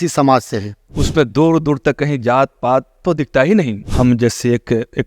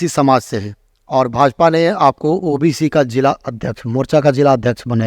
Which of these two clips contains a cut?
first; 2 cuts; at 0.9 s, 3.9 s

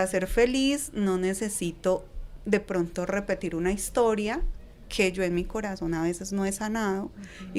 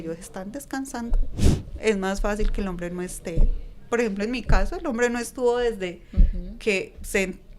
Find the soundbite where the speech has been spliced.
second; 1 cut; at 1.3 s

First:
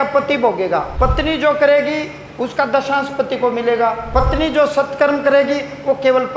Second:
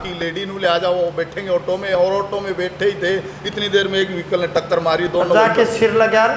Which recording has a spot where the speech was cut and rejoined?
first; 2 cuts; at 0.9 s, 4.0 s

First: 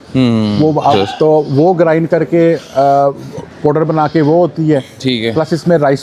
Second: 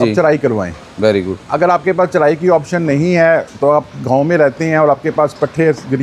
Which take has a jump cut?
first; 1 cut; at 0.9 s

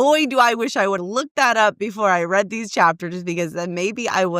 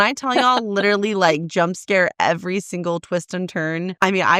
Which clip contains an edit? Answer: first; 1 cut; at 1.0 s

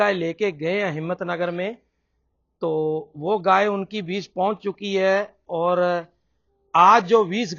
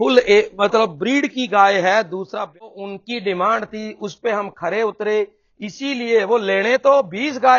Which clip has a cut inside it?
second; 1 cut; at 2.6 s

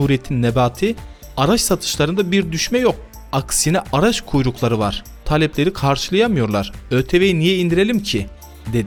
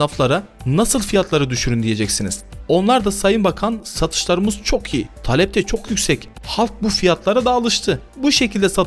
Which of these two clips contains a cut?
second; 1 cut; at 6.3 s

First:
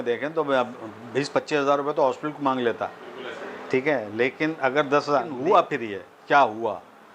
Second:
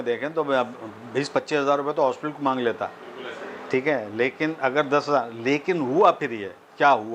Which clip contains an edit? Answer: first; 1 cut; at 5.3 s

